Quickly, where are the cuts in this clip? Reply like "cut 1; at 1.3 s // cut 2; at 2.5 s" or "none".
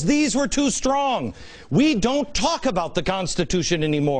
cut 1; at 2.5 s